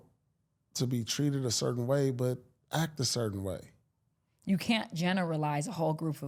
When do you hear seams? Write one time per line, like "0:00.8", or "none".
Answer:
none